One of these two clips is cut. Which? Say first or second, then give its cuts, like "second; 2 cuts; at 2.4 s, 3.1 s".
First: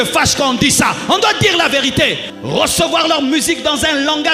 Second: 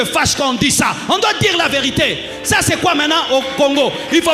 first; 1 cut; at 2.3 s